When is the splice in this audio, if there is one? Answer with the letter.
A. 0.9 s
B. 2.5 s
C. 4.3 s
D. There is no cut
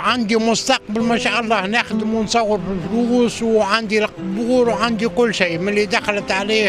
D